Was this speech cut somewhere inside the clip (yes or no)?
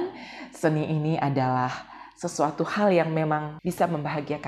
yes